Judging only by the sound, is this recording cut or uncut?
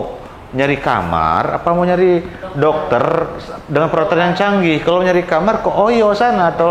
uncut